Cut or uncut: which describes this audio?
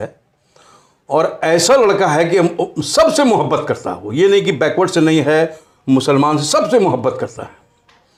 uncut